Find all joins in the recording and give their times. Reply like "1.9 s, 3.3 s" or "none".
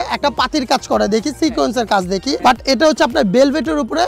none